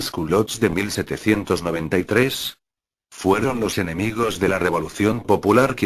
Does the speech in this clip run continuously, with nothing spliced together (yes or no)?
no